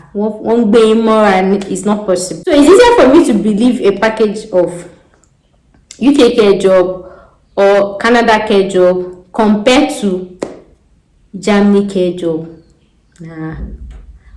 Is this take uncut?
no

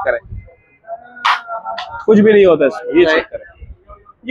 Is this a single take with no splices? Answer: yes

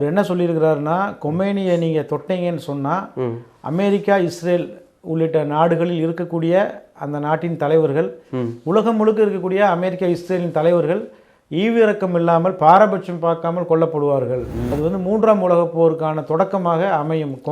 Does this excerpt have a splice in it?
yes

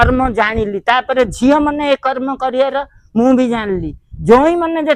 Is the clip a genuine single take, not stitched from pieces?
yes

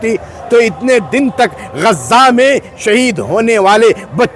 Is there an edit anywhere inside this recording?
no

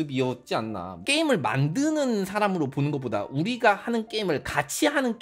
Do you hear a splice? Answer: yes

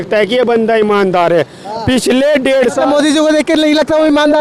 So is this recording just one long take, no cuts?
yes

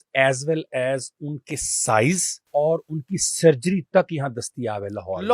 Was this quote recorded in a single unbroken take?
no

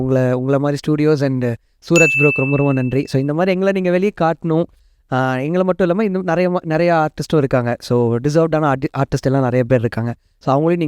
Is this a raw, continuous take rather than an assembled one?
yes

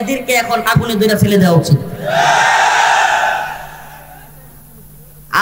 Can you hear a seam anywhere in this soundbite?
no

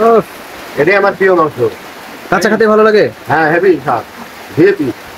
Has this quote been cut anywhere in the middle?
no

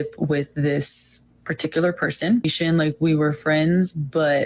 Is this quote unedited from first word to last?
no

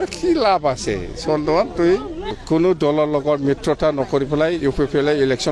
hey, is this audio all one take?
no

